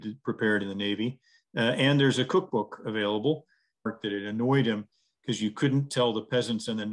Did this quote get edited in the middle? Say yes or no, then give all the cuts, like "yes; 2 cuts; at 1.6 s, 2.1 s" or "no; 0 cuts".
yes; 1 cut; at 3.9 s